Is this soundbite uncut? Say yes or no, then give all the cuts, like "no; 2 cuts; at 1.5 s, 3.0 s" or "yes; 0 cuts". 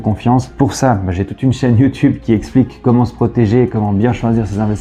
yes; 0 cuts